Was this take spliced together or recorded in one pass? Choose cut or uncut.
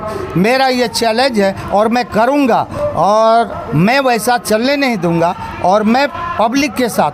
uncut